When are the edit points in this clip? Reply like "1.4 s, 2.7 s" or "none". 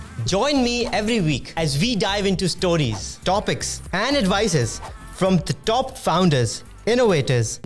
none